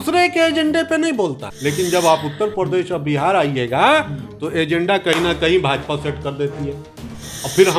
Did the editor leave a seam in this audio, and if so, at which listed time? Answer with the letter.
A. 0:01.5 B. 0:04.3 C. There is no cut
A